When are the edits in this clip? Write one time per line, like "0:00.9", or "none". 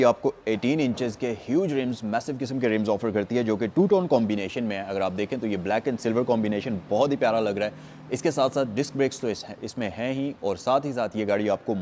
none